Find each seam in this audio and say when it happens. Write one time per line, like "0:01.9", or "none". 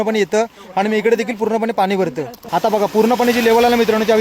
0:02.3